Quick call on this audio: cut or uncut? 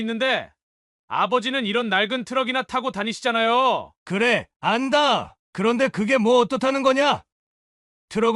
cut